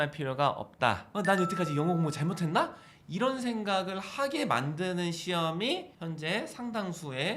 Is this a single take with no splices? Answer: no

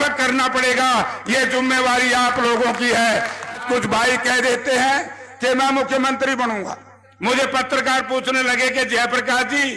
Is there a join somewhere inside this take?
yes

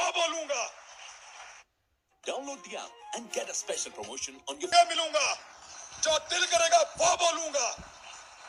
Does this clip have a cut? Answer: no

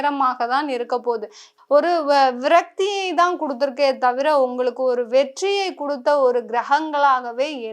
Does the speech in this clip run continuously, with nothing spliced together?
no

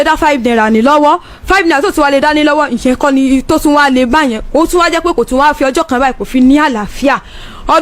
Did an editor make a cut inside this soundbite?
no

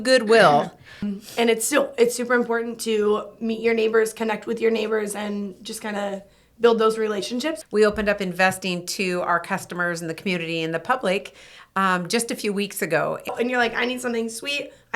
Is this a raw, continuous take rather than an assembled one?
no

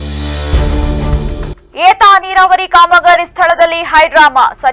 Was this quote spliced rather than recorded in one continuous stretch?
no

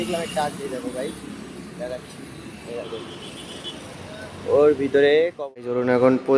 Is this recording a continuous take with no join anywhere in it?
no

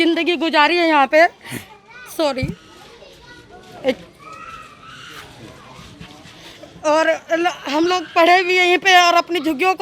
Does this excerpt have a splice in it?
no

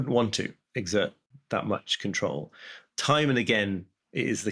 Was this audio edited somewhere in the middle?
yes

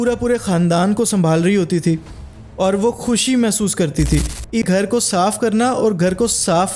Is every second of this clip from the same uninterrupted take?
no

